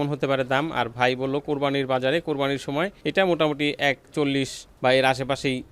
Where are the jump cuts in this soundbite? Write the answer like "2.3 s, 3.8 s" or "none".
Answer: 4.6 s